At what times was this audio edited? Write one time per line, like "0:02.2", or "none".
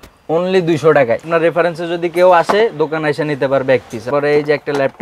0:01.3
0:04.1